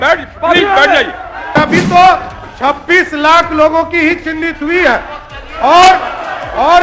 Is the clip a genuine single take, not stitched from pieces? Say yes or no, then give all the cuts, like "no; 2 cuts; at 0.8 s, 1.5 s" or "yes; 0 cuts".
no; 1 cut; at 1.5 s